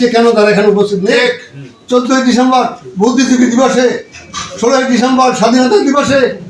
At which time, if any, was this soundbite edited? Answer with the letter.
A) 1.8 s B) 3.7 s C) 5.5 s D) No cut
A